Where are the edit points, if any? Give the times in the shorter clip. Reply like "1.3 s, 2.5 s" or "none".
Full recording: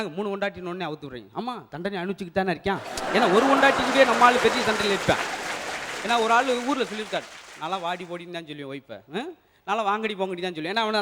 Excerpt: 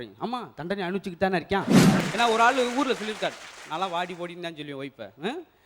2.0 s